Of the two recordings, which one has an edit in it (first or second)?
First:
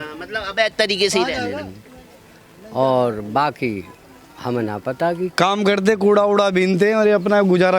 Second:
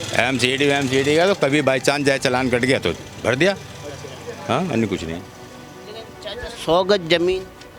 first